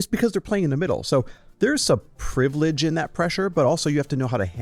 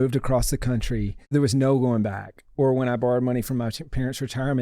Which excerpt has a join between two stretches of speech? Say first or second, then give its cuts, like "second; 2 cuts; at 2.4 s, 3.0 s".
second; 1 cut; at 1.3 s